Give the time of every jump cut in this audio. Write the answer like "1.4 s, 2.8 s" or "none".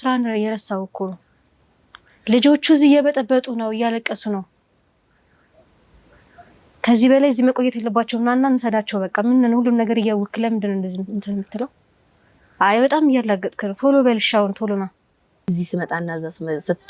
15.5 s